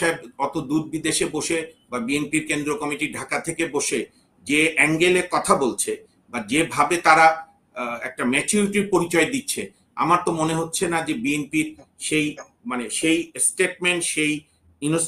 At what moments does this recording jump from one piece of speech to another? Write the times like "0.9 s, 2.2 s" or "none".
none